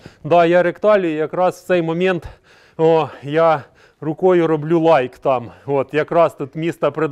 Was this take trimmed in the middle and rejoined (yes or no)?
no